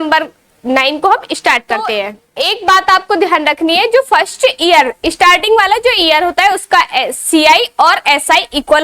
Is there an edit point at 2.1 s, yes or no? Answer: yes